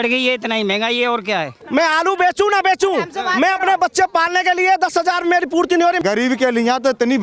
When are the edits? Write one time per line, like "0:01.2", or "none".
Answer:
0:01.6
0:06.0